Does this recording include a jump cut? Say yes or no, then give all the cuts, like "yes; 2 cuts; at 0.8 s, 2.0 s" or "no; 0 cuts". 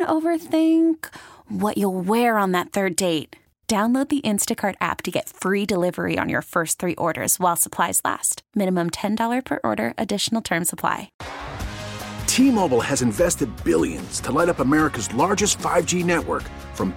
yes; 1 cut; at 11.2 s